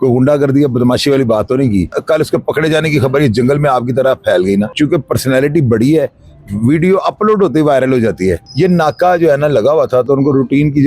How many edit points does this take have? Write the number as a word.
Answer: three